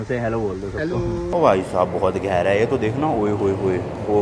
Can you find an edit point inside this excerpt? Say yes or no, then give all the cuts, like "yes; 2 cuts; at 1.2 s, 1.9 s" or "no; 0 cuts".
yes; 1 cut; at 1.3 s